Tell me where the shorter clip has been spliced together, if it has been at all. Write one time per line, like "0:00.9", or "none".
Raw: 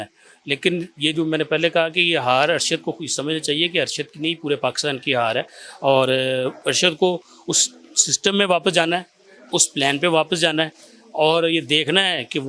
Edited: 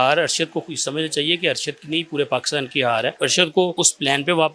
0:03.1
0:03.7